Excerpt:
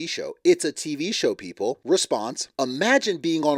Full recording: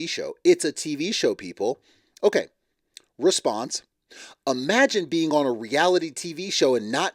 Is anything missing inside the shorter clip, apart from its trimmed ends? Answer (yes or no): yes